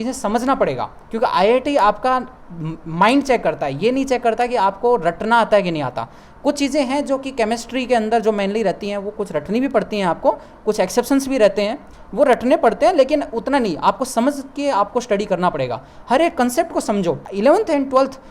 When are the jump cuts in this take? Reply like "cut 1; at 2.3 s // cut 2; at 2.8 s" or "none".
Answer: none